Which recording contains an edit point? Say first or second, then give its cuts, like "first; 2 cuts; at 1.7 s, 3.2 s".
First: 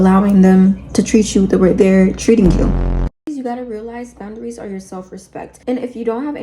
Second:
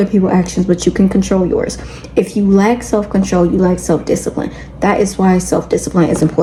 first; 1 cut; at 2.9 s